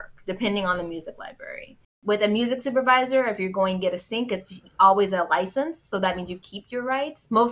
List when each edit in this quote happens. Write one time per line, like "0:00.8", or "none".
0:01.9